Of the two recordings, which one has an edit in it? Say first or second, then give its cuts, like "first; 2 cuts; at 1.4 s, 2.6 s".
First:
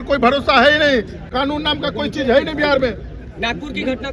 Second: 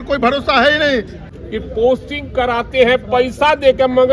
second; 1 cut; at 1.2 s